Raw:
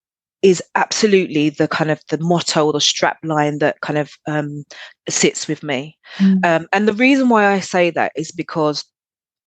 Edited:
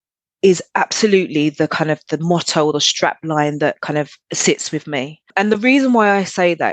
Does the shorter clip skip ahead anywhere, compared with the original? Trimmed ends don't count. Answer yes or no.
yes